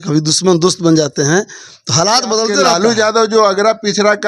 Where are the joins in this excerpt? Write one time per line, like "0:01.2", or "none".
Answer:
0:02.6

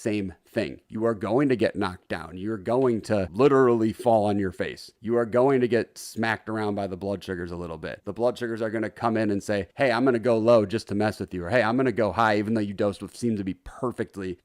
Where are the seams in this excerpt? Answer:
0:03.3

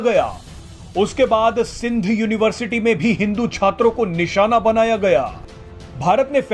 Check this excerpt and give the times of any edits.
0:05.3

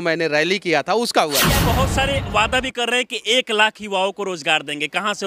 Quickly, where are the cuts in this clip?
0:01.7

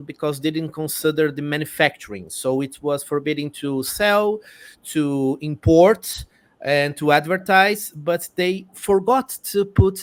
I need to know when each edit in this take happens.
none

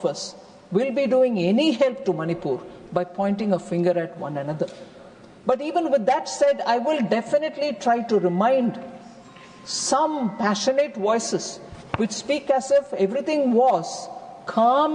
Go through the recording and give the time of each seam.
none

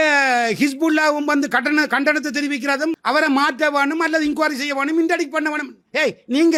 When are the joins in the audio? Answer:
none

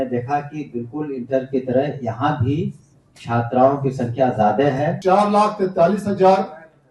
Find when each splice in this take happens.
0:05.0

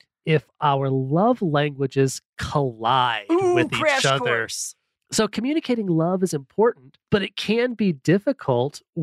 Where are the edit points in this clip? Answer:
none

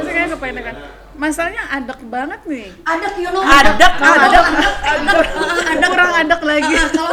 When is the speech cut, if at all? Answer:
none

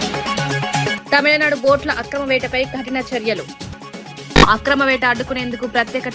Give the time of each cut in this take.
0:00.9

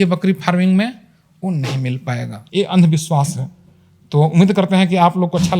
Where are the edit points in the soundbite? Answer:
0:02.4

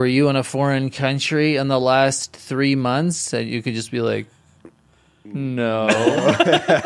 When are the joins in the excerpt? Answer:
none

